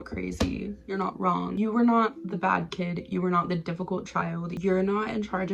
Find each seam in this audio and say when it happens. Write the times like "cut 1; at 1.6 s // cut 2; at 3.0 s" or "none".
cut 1; at 1.5 s // cut 2; at 4.5 s